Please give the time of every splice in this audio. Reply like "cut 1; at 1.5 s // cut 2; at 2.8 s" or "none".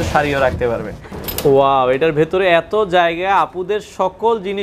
cut 1; at 1.1 s